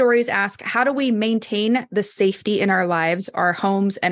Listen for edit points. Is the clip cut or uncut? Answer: uncut